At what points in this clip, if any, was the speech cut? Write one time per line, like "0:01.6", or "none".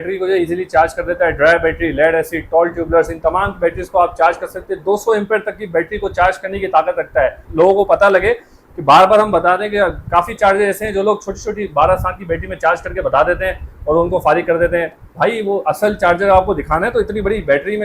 0:07.4